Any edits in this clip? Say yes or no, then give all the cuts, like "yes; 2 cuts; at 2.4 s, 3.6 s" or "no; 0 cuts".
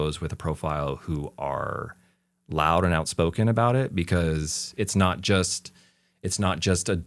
no; 0 cuts